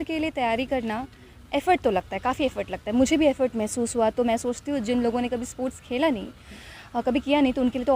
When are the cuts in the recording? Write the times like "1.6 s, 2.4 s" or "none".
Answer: none